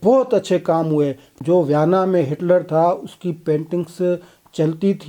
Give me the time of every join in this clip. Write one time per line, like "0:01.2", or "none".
0:01.2